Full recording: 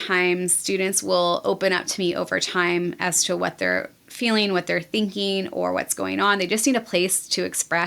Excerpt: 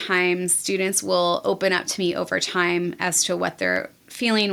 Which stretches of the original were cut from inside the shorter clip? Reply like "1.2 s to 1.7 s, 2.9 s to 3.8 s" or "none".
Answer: none